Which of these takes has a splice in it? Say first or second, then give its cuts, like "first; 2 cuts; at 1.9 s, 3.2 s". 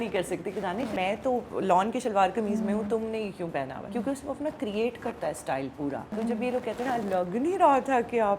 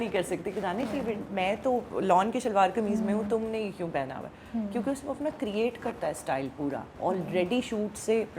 first; 3 cuts; at 0.9 s, 3.9 s, 6.2 s